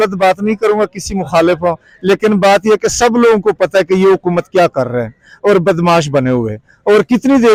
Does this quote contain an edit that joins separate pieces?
no; 0 cuts

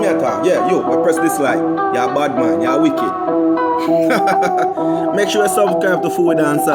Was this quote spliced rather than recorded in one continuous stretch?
no; 0 cuts

